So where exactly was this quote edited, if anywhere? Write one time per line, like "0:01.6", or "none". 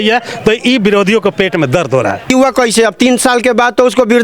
0:02.3